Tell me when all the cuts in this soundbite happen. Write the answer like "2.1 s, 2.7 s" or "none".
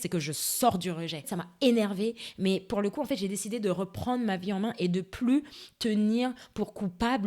none

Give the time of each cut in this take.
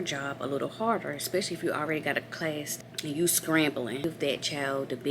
2.7 s, 4.0 s

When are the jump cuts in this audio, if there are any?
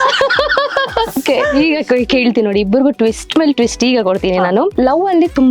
1.2 s, 4.7 s

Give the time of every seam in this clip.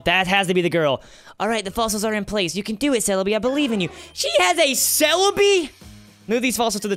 none

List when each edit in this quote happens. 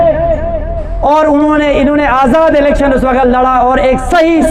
none

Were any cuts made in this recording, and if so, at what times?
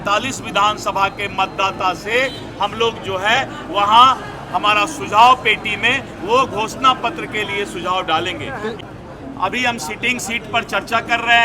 8.9 s

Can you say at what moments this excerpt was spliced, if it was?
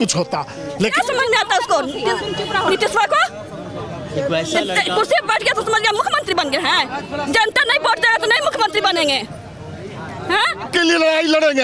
0.9 s, 10.7 s

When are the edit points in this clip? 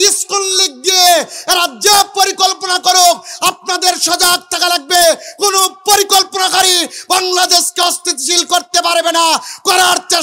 none

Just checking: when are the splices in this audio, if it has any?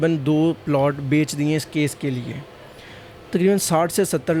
none

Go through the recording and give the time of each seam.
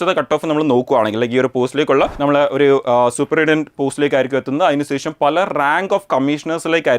2.1 s

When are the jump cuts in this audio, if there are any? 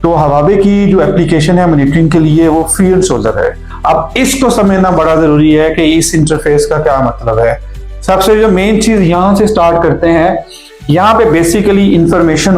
3.7 s

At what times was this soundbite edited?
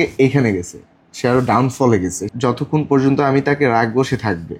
2.2 s

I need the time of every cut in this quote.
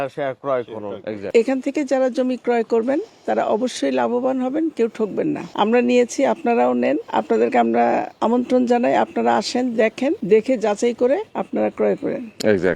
1.3 s, 5.5 s, 7.0 s, 8.1 s, 10.2 s, 11.3 s

